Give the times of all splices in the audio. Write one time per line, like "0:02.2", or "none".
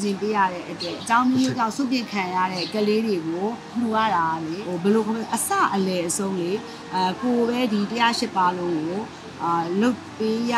0:01.0
0:02.6
0:03.7
0:04.6